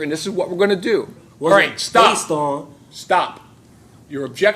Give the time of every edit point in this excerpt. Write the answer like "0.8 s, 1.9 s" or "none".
1.2 s

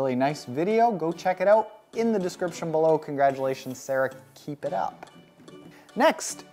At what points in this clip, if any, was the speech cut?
none

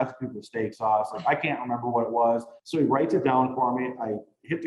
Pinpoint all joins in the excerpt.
2.6 s

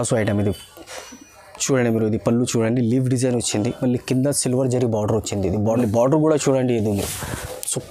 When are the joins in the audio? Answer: 5.6 s

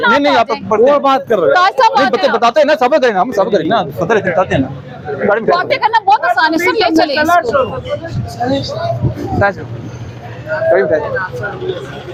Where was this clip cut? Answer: none

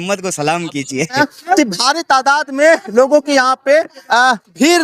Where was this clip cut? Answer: 1.2 s

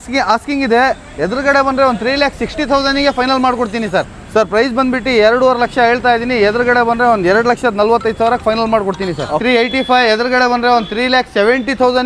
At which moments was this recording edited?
4.2 s, 9.4 s

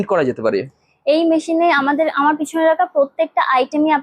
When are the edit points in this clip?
none

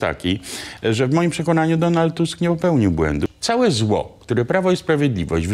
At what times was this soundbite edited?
3.3 s

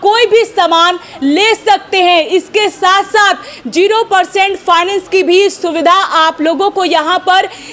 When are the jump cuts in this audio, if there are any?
none

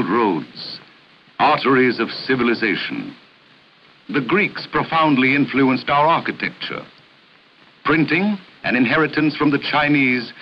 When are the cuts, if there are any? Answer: 9.3 s

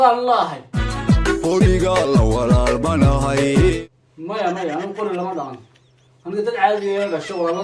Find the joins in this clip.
0.9 s, 3.8 s

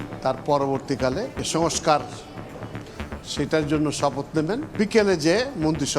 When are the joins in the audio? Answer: 1.4 s, 4.7 s

